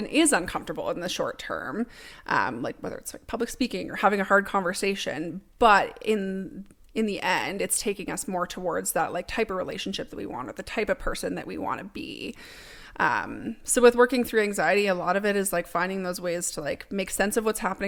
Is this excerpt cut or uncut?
uncut